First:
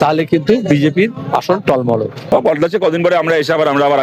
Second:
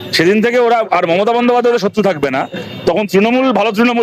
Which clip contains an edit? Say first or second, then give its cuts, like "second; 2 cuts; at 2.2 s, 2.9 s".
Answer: first; 1 cut; at 2.3 s